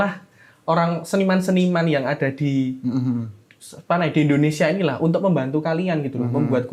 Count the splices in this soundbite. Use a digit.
0